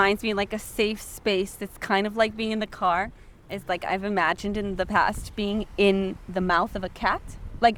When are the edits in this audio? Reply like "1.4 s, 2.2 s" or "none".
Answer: none